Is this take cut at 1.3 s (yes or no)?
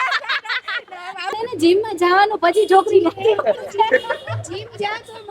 yes